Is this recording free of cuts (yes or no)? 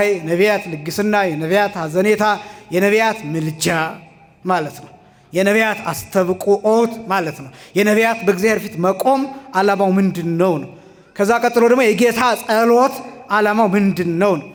yes